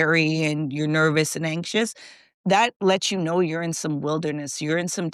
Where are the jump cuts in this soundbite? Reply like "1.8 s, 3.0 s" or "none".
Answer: none